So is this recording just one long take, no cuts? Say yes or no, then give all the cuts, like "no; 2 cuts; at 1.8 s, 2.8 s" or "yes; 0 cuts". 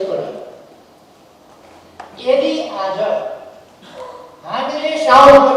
no; 1 cut; at 1.6 s